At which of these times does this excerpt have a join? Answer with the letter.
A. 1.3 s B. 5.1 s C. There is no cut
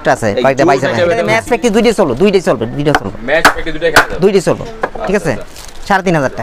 A